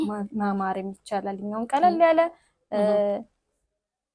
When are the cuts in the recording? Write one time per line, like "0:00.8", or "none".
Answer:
none

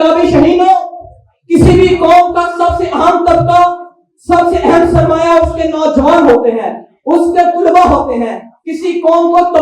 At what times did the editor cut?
none

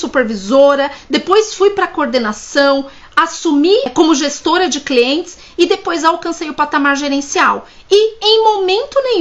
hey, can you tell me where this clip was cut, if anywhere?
0:03.9

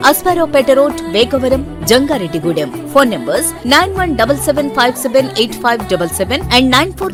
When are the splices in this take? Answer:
none

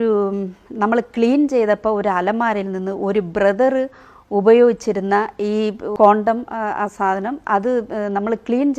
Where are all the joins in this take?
0:05.9

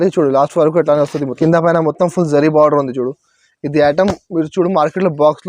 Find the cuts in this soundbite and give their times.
0:01.3

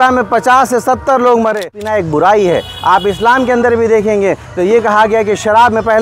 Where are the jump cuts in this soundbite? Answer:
0:01.8

